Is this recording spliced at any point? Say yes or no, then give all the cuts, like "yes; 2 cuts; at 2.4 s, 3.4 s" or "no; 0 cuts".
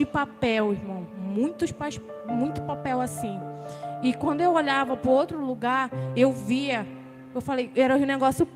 no; 0 cuts